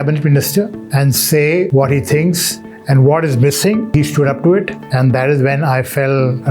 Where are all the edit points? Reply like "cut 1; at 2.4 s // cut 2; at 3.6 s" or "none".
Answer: cut 1; at 1.7 s // cut 2; at 3.9 s